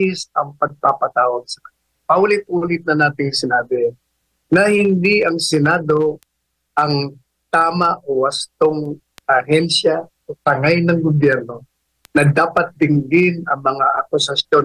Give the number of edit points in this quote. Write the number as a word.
zero